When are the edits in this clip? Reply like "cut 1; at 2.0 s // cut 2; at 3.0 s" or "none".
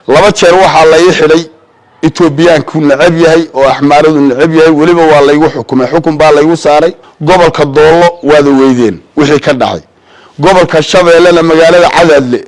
cut 1; at 7.1 s